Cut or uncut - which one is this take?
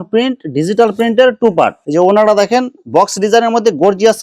cut